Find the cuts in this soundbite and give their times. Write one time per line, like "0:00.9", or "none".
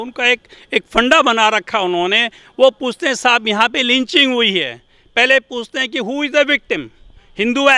none